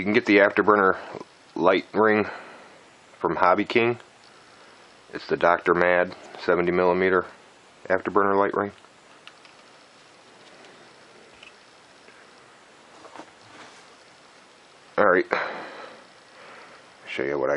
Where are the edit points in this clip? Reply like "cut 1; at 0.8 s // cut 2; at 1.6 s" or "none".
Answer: cut 1; at 2.4 s